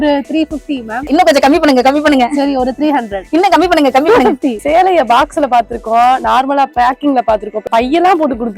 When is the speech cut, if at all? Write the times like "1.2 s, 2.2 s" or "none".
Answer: 1.1 s, 3.2 s, 4.6 s, 7.6 s